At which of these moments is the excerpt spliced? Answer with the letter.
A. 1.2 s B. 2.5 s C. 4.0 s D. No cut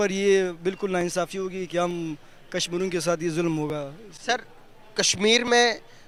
D